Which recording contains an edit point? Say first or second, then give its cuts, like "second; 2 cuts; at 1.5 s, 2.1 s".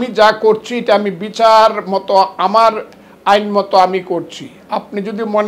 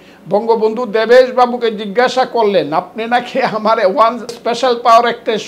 second; 1 cut; at 4.4 s